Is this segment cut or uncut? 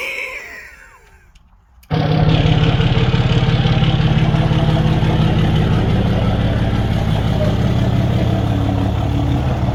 uncut